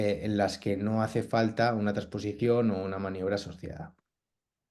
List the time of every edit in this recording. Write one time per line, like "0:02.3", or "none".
none